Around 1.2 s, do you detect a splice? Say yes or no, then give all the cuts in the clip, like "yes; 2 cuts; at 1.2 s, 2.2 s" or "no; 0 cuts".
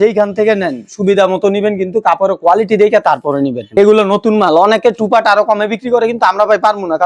no; 1 cut; at 3.8 s